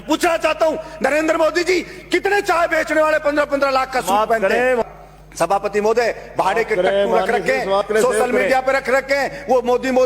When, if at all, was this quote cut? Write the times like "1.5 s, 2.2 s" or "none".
4.8 s